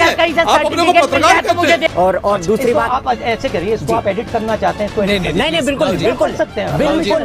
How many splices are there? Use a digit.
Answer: 1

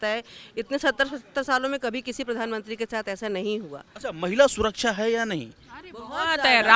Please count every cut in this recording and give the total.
0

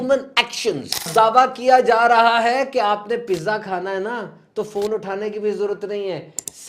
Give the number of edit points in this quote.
1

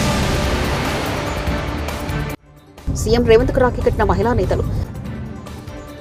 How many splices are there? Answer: 0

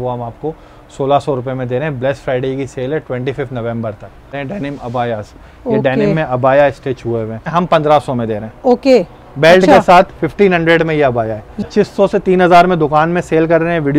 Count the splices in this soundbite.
3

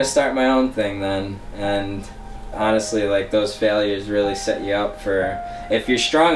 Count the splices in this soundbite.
1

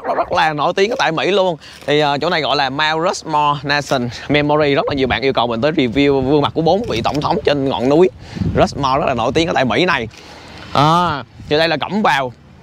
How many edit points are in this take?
0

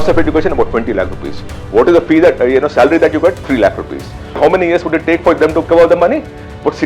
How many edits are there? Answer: 2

